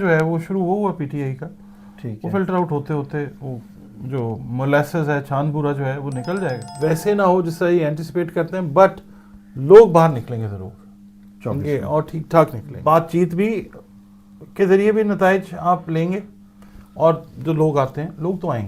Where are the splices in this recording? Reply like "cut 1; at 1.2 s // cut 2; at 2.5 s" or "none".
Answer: cut 1; at 6.7 s // cut 2; at 12.7 s